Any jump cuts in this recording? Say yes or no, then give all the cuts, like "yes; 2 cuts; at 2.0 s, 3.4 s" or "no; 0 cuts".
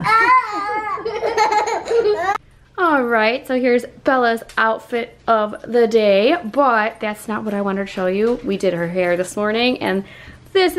yes; 1 cut; at 2.4 s